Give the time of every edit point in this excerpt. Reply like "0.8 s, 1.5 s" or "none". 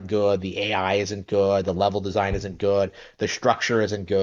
none